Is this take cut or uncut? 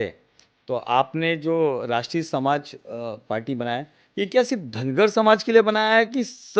uncut